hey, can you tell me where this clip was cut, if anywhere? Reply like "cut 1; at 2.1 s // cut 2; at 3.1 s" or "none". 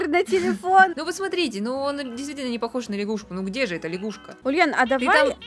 cut 1; at 1.0 s // cut 2; at 4.4 s